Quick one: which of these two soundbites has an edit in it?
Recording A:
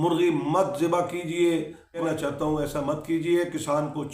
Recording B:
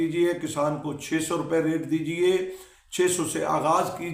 A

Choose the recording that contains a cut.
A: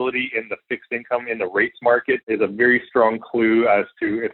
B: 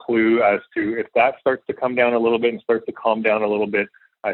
A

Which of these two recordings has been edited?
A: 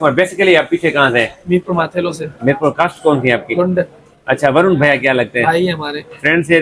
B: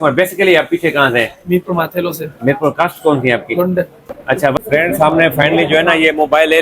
B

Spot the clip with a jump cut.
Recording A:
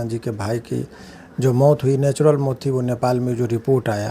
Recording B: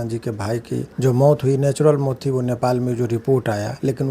B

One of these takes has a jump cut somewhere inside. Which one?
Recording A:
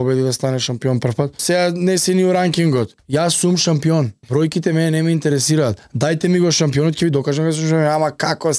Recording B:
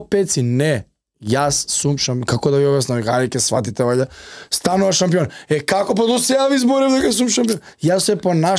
A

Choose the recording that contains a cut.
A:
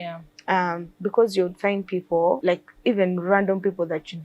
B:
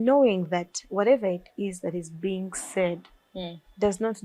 A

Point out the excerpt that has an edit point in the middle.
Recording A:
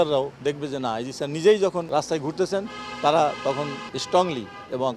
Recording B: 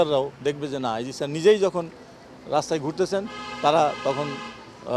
A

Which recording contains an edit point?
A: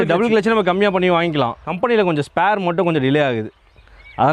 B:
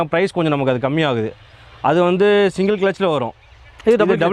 A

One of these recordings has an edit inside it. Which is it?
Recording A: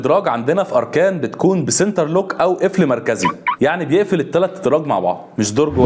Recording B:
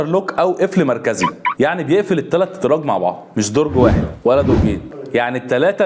B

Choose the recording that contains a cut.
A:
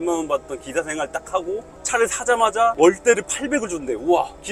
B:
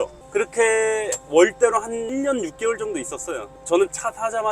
B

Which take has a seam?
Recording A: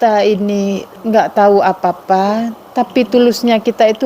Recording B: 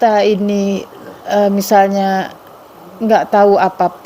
A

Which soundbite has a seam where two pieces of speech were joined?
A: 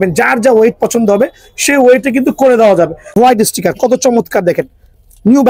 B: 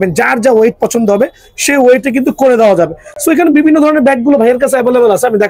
A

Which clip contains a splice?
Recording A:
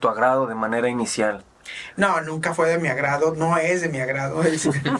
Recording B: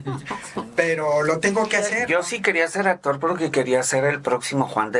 B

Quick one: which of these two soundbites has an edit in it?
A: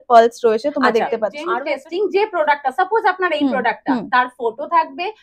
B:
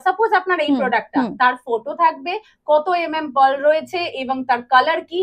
A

